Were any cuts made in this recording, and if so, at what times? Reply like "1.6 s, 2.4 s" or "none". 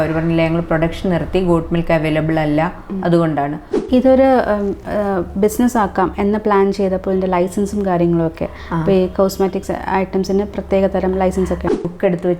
3.7 s, 11.7 s